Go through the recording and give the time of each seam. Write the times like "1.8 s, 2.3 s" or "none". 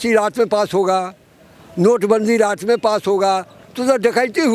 none